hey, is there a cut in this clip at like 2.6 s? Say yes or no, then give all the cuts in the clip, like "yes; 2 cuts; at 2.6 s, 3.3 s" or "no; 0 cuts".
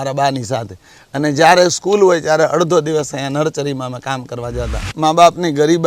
no; 1 cut; at 4.9 s